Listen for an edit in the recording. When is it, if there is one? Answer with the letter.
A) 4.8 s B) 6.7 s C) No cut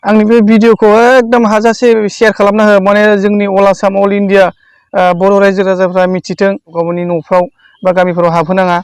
B